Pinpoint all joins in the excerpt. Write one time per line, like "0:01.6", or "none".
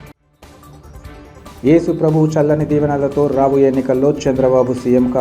0:01.2